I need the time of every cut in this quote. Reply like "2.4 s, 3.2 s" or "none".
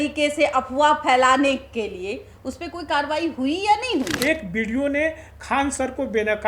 4.1 s